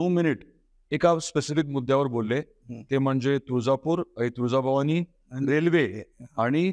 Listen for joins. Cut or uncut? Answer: uncut